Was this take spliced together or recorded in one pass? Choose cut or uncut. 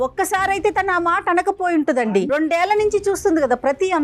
cut